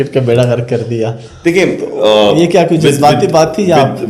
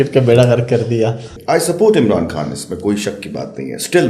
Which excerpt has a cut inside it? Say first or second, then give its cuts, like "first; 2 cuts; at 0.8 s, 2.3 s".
second; 1 cut; at 1.3 s